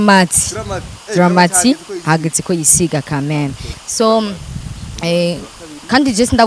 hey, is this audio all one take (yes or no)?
no